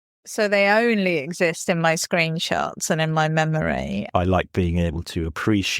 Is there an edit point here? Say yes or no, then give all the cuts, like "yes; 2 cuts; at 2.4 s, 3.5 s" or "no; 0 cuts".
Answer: yes; 1 cut; at 4.0 s